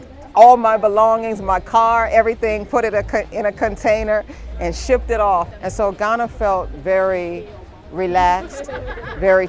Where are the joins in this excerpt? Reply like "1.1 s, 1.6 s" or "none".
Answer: 5.5 s